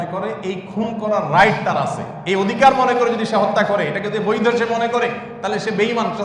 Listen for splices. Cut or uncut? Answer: uncut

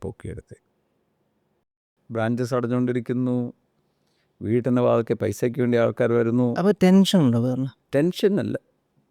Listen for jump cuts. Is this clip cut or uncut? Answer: cut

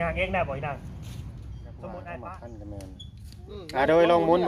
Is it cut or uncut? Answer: cut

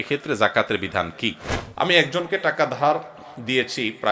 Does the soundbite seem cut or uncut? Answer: cut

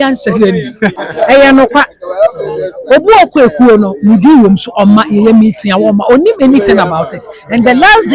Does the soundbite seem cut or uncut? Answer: cut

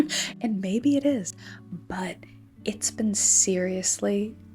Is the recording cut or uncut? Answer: uncut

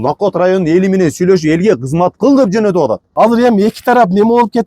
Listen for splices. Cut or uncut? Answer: cut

